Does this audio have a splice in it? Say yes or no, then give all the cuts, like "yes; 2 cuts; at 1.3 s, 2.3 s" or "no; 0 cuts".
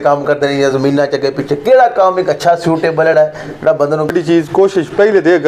yes; 1 cut; at 4.1 s